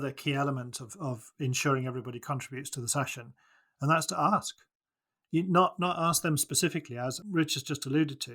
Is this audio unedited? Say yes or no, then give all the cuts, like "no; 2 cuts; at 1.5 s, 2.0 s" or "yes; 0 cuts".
no; 1 cut; at 7.2 s